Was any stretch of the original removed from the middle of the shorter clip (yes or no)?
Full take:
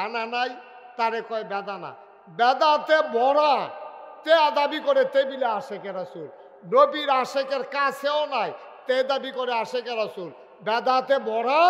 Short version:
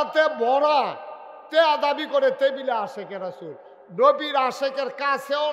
no